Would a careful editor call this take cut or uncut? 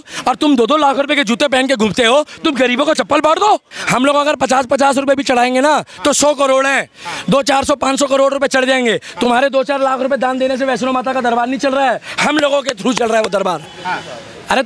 cut